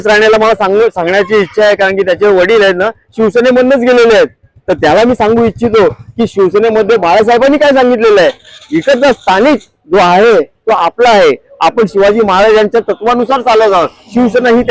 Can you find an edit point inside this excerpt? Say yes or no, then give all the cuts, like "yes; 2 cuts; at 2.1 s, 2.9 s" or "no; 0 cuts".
no; 0 cuts